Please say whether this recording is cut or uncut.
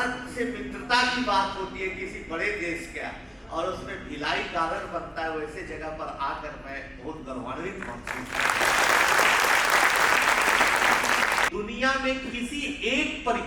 cut